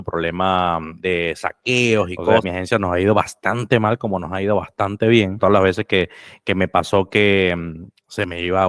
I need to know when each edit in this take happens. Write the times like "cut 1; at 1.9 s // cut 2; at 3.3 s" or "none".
cut 1; at 0.9 s // cut 2; at 2.4 s // cut 3; at 5.4 s